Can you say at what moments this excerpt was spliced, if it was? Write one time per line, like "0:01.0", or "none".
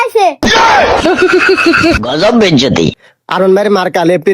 0:02.9